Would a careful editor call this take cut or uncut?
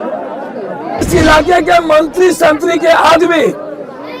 cut